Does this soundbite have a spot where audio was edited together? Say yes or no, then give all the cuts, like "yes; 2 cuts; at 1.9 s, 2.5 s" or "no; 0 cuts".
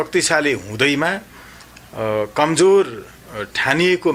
no; 0 cuts